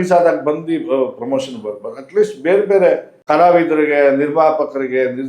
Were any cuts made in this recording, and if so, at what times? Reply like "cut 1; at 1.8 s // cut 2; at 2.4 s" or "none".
cut 1; at 3.2 s